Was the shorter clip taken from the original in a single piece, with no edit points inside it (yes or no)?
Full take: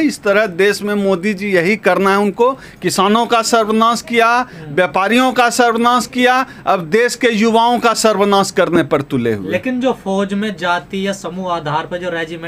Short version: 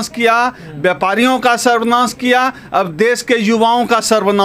yes